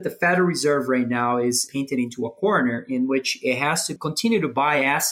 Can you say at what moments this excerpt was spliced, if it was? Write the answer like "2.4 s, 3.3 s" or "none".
1.6 s, 3.9 s